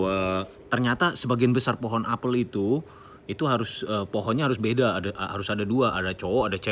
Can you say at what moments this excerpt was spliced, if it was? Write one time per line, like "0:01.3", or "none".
none

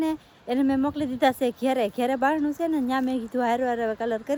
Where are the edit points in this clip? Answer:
none

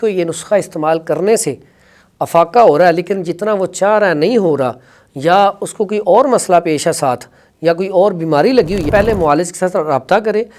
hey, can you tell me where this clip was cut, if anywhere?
0:08.8

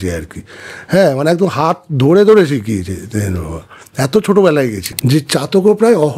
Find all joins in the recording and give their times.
0:04.9

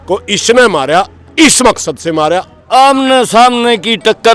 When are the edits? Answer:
0:02.5

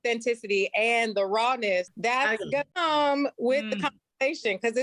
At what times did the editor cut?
0:01.9
0:02.7

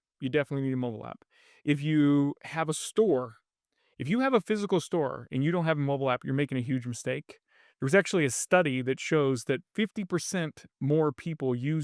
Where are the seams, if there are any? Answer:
none

